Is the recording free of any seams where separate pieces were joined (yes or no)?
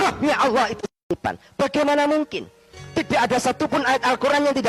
no